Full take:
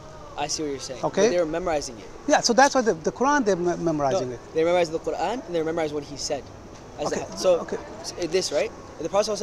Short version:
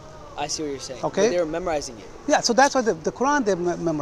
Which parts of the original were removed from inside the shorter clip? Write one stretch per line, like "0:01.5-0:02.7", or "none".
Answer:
none